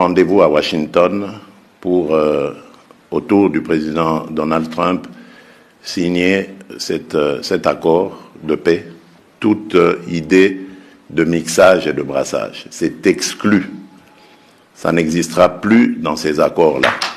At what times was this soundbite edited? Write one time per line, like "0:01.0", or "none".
none